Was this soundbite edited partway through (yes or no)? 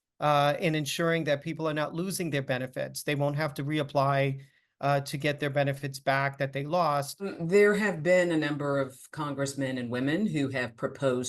yes